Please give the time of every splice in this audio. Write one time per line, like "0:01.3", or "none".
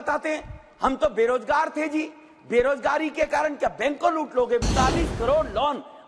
0:04.6